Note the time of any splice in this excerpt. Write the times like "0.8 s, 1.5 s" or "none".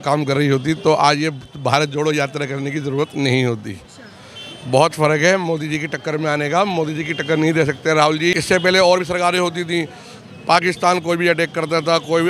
8.4 s